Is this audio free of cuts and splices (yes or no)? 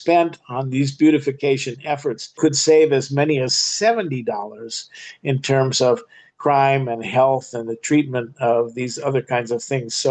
no